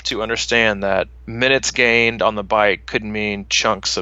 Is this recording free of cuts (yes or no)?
no